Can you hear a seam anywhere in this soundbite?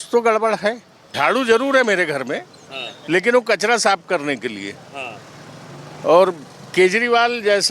yes; 1 cut; at 1.0 s

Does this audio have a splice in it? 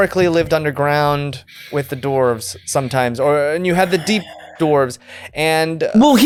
no; 0 cuts

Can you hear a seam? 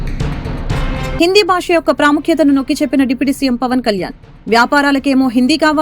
no; 0 cuts

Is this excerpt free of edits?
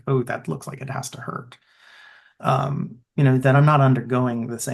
yes; 0 cuts

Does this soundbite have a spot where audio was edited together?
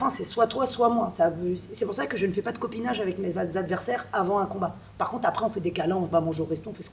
no; 0 cuts

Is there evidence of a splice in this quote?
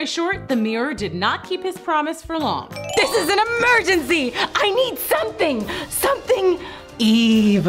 yes; 1 cut; at 2.8 s

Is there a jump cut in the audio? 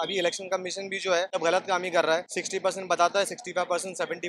yes; 2 cuts; at 1.3 s, 2.4 s

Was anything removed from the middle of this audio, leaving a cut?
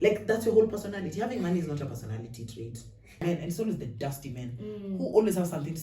yes; 1 cut; at 3.2 s

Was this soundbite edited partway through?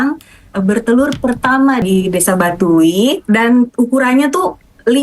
yes; 2 cuts; at 1.8 s, 3.2 s

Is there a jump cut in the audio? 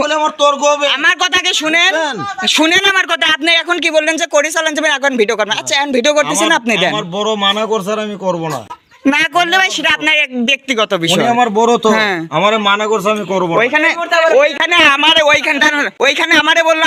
no; 0 cuts

